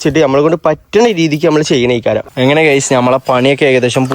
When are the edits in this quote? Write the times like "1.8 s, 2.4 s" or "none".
2.3 s